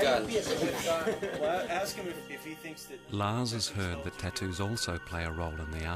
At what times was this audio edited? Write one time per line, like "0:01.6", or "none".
0:02.8